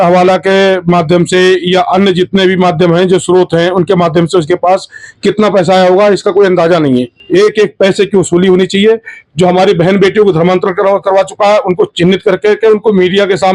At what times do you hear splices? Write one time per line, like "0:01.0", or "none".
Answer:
0:07.2